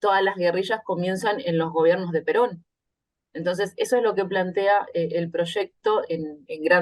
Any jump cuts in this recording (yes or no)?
no